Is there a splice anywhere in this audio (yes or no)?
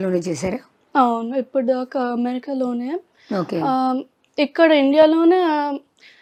no